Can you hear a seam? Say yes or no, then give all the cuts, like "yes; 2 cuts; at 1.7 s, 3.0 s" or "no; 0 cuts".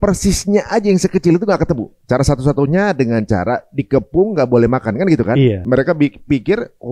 yes; 2 cuts; at 1.9 s, 5.6 s